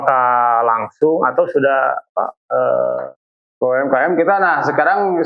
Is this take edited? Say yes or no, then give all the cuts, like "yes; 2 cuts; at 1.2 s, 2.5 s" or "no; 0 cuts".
yes; 1 cut; at 3.0 s